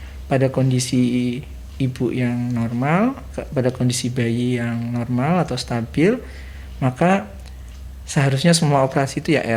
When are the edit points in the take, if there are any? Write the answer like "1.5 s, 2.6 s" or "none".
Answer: none